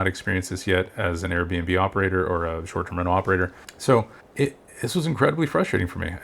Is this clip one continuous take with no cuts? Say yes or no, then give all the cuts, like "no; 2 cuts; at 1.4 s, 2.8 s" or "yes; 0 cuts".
no; 1 cut; at 3.6 s